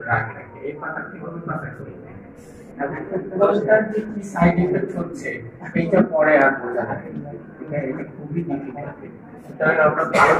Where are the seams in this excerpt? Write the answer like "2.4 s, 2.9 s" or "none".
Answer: none